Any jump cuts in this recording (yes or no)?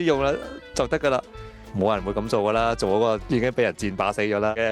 no